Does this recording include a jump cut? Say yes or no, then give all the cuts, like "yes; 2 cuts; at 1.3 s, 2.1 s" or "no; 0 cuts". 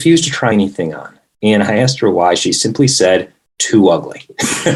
no; 0 cuts